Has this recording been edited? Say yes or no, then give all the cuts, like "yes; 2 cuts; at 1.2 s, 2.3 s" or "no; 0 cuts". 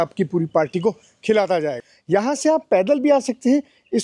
yes; 1 cut; at 1.9 s